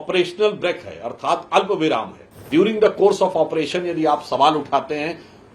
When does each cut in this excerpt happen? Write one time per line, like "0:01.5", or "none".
0:02.5